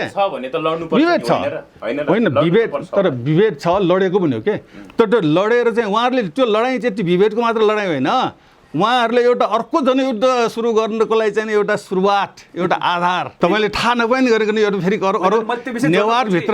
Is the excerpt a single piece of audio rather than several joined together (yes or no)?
no